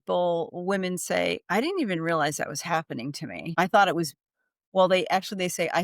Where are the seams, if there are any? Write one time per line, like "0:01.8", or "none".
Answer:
0:03.3

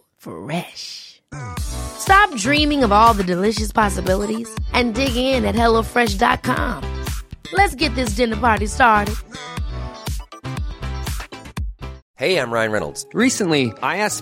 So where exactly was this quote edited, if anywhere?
0:12.0

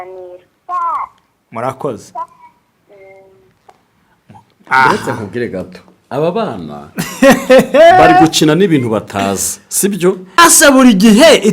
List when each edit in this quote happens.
0:10.4

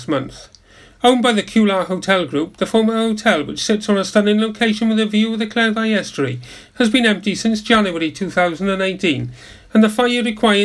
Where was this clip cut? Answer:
none

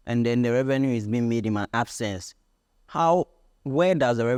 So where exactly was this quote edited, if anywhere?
none

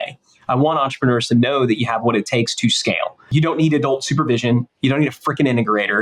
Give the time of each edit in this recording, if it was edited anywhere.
0:03.3

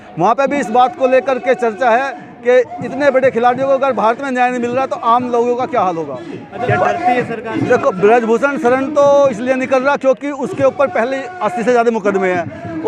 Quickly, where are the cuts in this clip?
0:06.6

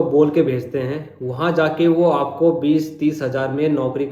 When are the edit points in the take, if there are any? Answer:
none

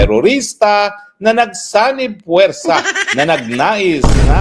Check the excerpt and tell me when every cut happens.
none

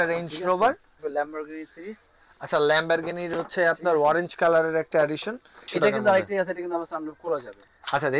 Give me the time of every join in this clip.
0:01.0
0:05.7

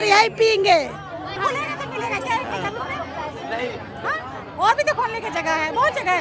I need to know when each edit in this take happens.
0:01.4

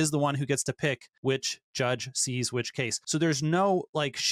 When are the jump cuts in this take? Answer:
0:01.1
0:03.0

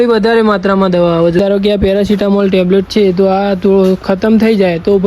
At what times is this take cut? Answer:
0:01.4

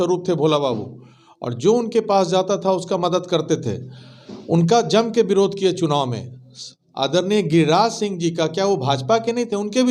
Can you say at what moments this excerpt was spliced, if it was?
none

